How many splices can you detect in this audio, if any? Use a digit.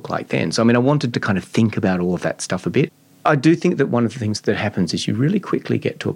2